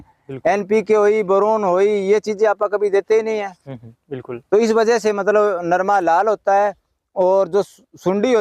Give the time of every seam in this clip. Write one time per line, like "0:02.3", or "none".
none